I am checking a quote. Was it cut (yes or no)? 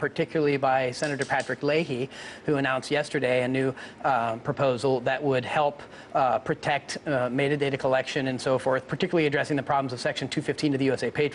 yes